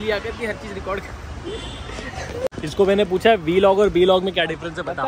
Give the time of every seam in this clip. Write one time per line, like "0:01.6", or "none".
0:02.5